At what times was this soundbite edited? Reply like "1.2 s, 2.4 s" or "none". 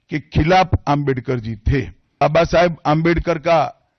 2.2 s